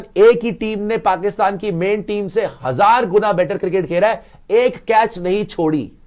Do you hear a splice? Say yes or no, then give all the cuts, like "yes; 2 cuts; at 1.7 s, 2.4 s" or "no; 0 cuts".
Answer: no; 0 cuts